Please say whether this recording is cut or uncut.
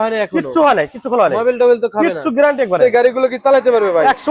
cut